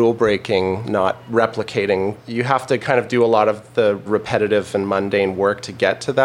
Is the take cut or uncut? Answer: cut